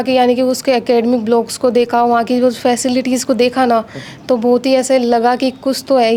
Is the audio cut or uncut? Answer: uncut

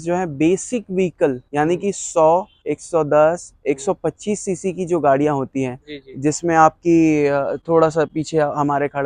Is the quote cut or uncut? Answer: uncut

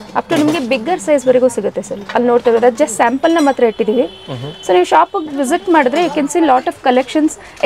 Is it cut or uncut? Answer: uncut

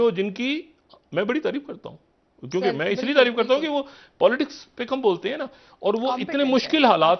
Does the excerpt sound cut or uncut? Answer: uncut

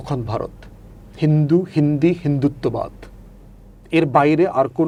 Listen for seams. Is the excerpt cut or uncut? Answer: uncut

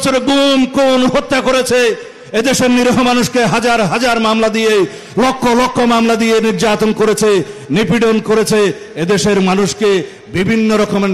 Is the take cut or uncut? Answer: uncut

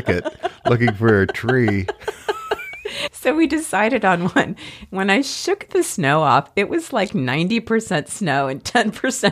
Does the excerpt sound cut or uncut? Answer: uncut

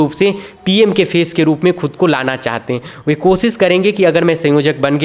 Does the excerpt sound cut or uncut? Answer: uncut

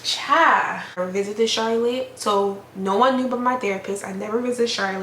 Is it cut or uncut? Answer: cut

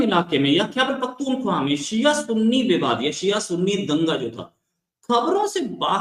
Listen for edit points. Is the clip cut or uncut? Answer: uncut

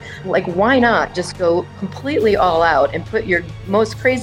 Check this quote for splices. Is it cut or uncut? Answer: uncut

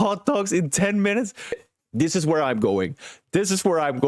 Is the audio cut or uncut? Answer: cut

